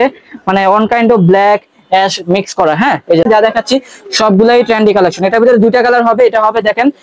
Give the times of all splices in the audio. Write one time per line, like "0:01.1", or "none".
0:03.2